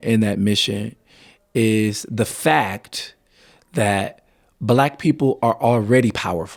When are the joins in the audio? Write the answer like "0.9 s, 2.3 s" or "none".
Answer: none